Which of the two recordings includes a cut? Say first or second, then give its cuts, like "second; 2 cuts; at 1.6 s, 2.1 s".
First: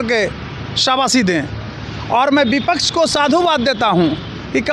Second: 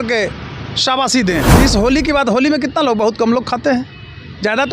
second; 1 cut; at 1.5 s